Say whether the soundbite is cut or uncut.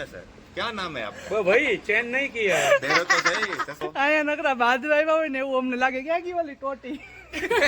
cut